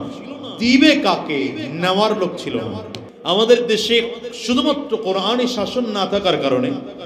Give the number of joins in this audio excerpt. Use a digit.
1